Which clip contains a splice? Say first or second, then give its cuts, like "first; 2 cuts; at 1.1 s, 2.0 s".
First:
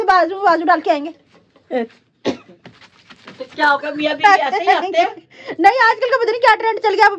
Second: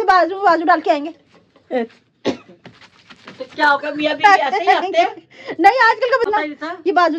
second; 1 cut; at 6.3 s